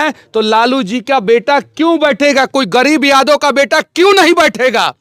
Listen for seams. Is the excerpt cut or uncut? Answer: uncut